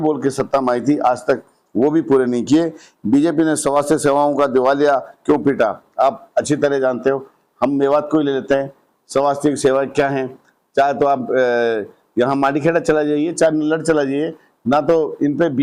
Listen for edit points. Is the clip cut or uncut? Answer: uncut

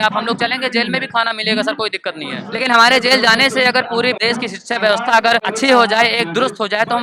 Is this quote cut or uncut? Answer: cut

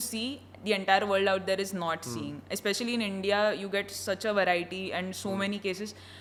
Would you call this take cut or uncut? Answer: uncut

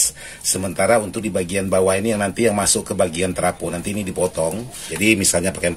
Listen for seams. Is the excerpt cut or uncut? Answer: cut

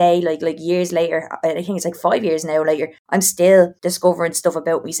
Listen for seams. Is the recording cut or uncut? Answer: cut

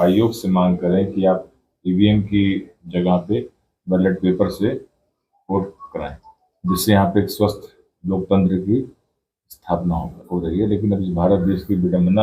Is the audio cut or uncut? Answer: cut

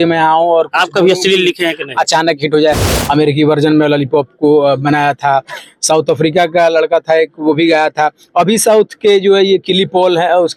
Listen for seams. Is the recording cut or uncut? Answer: cut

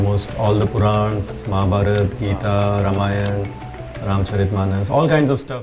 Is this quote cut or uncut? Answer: uncut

